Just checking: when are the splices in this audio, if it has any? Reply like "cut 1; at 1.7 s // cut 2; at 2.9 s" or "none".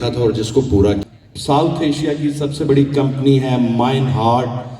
cut 1; at 1.1 s

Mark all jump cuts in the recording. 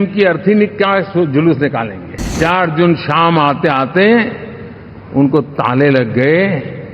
cut 1; at 2.3 s

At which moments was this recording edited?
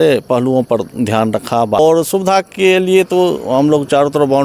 cut 1; at 1.8 s

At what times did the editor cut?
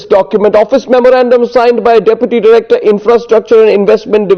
none

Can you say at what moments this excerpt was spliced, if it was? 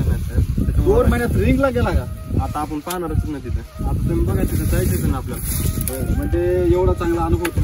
cut 1; at 3.8 s

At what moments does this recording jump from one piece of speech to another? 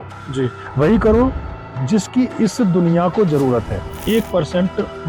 cut 1; at 4.0 s

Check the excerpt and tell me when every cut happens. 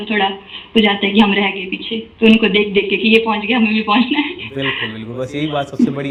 none

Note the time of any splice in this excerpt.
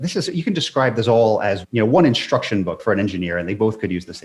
cut 1; at 2.8 s

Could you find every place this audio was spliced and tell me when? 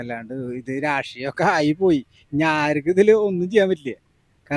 none

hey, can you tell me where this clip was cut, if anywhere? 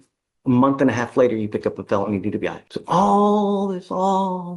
cut 1; at 2.7 s

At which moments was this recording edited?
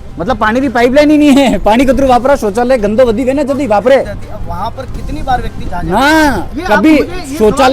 cut 1; at 4.2 s

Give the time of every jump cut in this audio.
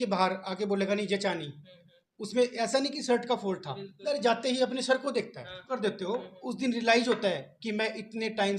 cut 1; at 4.0 s // cut 2; at 5.8 s

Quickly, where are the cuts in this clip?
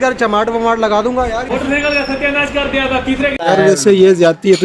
cut 1; at 1.4 s // cut 2; at 3.3 s

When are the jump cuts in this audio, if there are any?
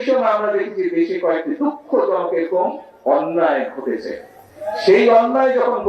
none

